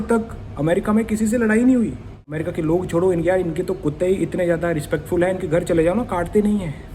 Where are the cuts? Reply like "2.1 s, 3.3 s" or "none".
2.4 s